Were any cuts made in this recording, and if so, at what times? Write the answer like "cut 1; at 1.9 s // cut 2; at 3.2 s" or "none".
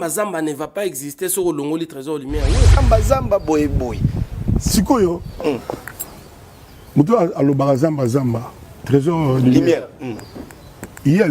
cut 1; at 2.7 s